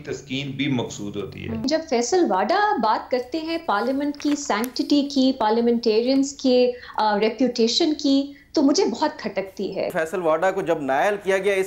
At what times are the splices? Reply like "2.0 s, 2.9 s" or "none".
1.6 s, 9.9 s